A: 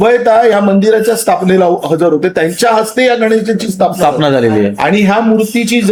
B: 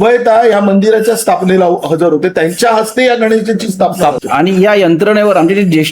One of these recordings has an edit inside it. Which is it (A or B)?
B